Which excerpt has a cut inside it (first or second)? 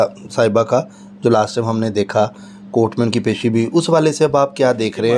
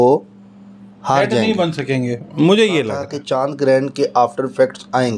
second